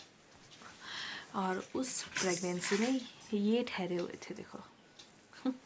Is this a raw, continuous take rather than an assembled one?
yes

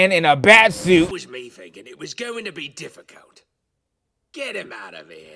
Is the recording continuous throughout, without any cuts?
no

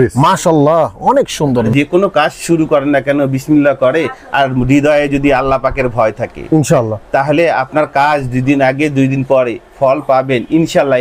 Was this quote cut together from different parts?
yes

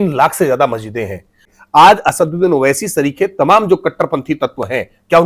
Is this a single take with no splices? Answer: no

